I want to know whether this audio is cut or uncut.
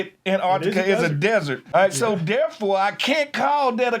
cut